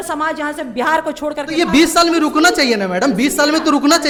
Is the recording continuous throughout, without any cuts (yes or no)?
yes